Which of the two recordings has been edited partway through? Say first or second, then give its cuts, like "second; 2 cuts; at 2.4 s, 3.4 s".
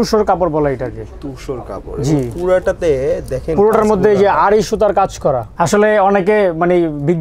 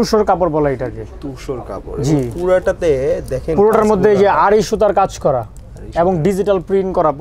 first; 1 cut; at 5.5 s